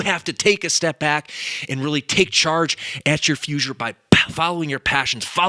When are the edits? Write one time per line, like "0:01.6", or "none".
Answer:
none